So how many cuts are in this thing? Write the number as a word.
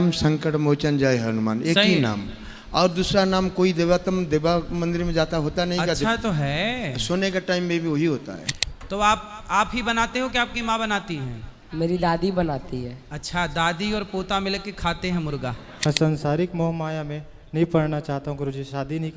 two